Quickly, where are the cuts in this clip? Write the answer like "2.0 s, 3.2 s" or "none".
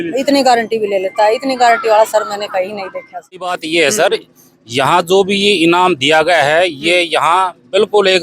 3.6 s